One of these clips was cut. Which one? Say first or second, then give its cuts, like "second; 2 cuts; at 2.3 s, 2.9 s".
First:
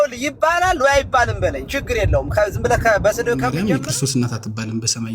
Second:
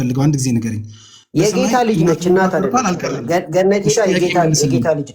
first; 1 cut; at 3.5 s